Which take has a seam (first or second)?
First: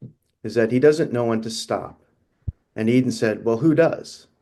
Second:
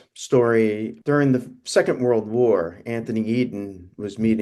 second